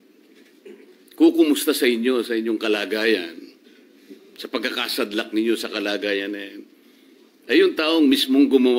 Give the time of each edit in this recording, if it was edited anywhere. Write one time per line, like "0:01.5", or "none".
none

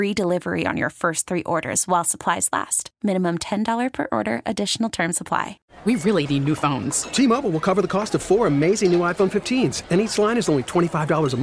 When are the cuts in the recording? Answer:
0:05.6

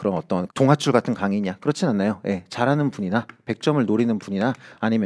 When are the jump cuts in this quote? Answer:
none

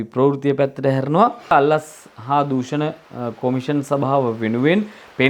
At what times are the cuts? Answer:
0:01.5

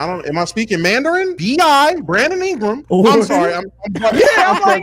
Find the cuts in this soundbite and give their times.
0:01.4
0:02.8

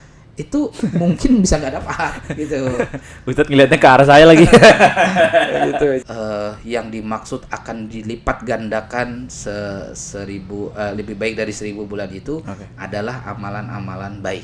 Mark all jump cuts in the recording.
0:06.0

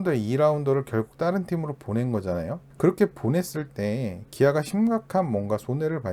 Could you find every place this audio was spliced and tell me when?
0:02.7

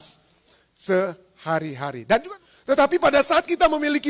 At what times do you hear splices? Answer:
0:02.4

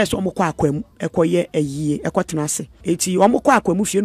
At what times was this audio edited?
0:00.9
0:02.7

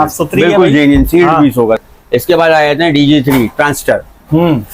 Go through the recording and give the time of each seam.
0:01.8

